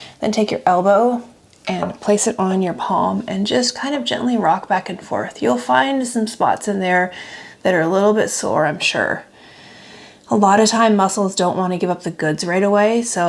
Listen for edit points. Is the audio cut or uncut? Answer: uncut